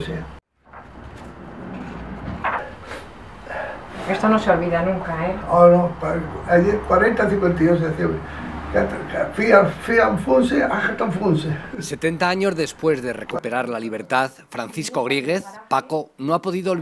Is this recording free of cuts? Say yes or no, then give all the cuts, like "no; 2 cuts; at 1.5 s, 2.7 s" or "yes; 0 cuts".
yes; 0 cuts